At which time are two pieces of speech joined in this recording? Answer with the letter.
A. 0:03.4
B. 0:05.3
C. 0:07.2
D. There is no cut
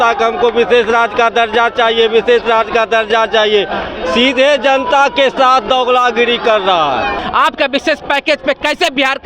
C